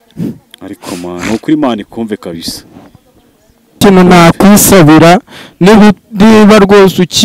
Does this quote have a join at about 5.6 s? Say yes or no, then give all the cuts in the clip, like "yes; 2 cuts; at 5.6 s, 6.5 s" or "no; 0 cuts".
no; 1 cut; at 3.8 s